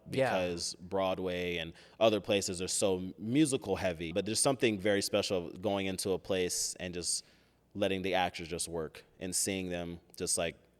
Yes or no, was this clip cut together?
yes